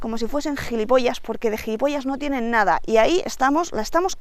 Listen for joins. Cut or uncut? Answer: uncut